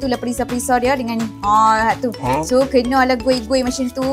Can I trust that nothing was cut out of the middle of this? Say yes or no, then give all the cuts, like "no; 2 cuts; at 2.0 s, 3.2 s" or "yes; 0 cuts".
yes; 0 cuts